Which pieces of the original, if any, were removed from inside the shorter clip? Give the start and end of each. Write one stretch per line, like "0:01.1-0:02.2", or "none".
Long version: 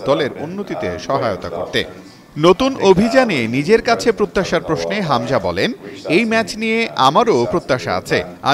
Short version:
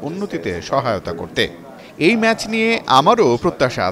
0:02.2-0:05.9